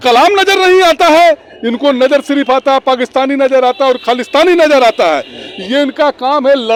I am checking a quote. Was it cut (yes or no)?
no